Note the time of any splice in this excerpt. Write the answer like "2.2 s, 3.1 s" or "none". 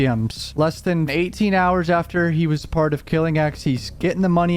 1.1 s